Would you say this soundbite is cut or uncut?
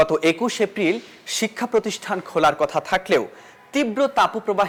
uncut